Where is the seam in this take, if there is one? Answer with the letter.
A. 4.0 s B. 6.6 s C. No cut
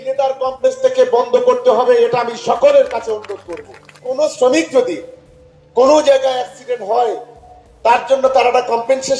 A